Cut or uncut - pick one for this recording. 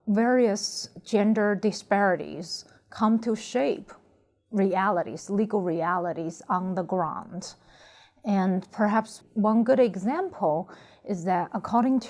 uncut